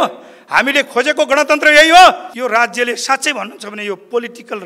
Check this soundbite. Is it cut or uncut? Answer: cut